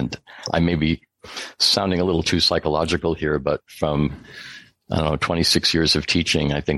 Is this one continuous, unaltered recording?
yes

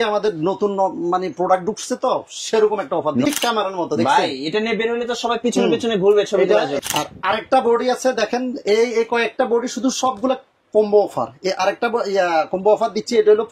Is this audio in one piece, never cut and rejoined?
no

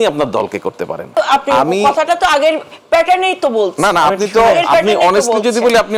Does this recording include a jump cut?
yes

